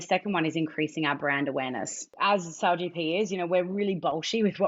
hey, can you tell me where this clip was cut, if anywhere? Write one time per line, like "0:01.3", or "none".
0:02.0